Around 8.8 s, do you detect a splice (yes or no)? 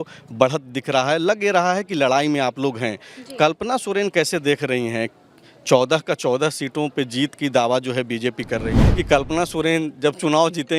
yes